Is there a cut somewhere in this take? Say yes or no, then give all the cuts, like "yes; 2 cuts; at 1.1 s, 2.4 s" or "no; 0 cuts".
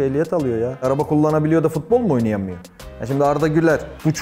no; 0 cuts